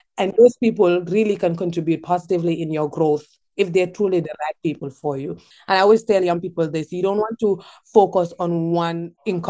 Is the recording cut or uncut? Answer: cut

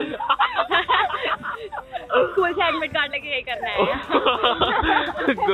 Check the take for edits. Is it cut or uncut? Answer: uncut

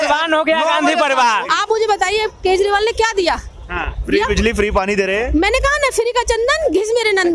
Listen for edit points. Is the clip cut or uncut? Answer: cut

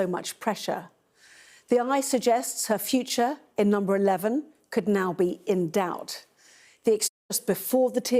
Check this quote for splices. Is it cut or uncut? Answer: cut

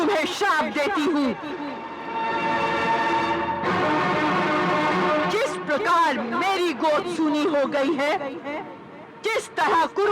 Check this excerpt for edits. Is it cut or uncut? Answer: uncut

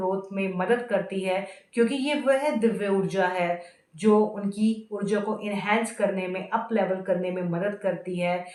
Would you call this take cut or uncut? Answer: uncut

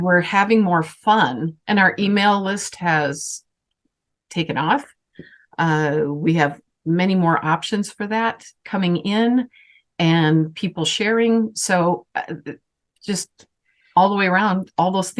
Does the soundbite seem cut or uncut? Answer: cut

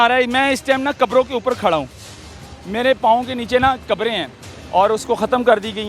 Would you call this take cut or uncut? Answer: uncut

